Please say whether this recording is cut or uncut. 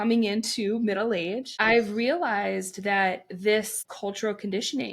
cut